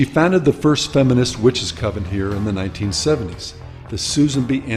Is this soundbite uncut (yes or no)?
no